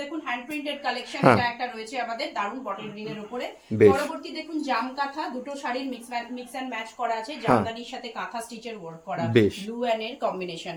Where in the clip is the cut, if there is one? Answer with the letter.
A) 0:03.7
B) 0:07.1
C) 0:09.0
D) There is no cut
D